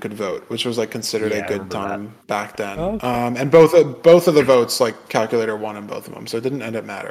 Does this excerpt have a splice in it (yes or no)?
no